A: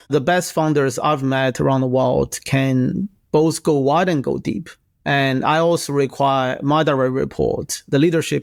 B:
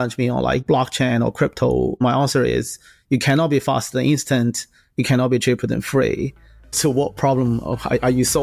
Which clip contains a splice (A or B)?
B